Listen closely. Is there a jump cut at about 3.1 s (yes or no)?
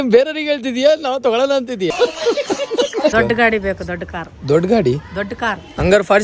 yes